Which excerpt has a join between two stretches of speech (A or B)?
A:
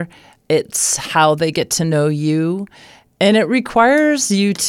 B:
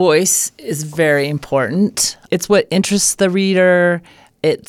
B